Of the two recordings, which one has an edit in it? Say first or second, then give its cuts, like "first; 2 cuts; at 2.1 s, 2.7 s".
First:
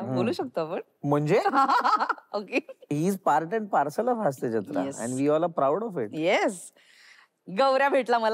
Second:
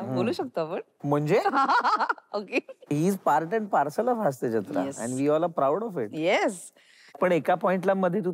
second; 1 cut; at 7.2 s